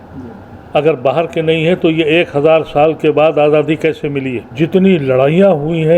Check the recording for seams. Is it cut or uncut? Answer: cut